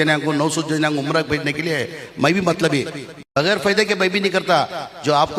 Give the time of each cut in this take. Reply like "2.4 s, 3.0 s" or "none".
3.1 s